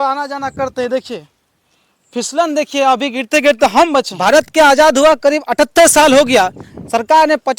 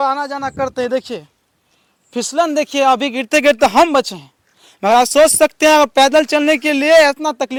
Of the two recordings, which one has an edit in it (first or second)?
first